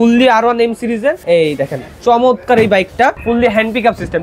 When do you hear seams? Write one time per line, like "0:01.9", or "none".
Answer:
0:01.2
0:03.2